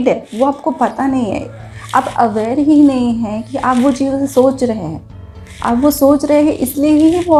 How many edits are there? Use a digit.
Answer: 0